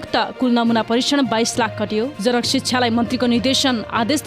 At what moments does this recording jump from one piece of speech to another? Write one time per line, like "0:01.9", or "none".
0:02.1